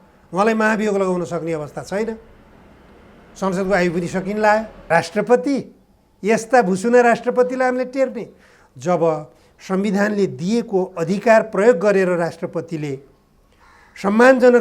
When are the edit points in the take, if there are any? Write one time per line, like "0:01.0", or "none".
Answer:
0:04.8